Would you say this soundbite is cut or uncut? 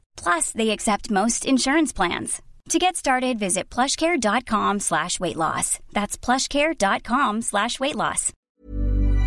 cut